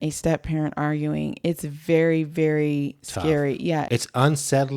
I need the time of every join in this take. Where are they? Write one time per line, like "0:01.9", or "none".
0:03.9